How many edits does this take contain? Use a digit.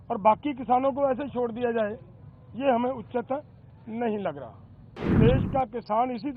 1